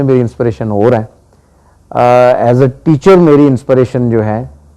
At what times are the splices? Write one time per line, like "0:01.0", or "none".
none